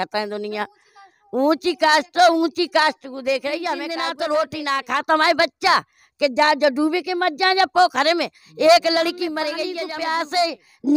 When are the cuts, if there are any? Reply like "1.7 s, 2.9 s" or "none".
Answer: 4.0 s, 9.7 s